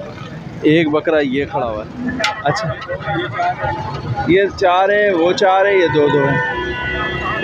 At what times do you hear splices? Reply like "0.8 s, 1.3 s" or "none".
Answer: 1.6 s